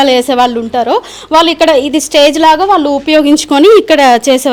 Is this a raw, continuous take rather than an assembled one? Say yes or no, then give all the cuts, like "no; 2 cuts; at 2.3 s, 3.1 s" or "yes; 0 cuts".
yes; 0 cuts